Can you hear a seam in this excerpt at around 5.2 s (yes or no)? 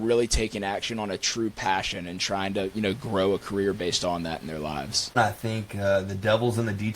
yes